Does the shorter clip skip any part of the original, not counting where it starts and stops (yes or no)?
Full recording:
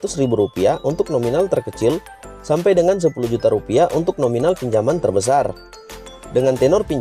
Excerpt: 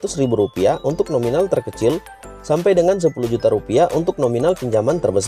no